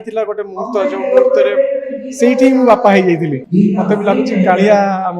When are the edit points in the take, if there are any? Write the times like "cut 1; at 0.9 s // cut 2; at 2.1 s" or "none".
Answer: cut 1; at 3.3 s